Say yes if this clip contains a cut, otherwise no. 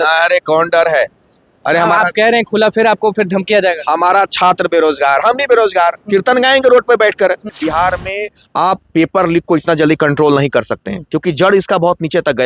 yes